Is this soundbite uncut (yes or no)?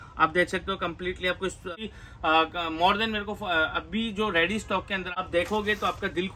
no